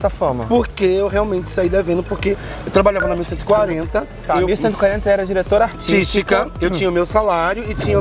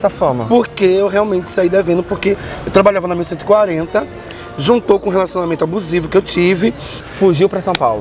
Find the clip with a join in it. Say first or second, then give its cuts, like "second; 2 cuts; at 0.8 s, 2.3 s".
second; 2 cuts; at 4.1 s, 7.1 s